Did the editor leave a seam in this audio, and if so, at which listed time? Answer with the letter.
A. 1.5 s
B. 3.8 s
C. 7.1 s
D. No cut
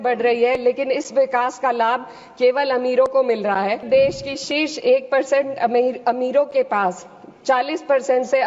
B